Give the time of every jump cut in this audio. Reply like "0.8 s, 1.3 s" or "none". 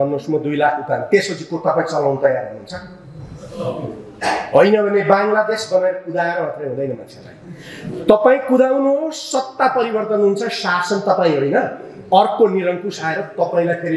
none